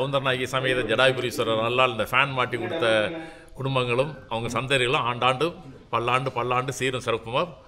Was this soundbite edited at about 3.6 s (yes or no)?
no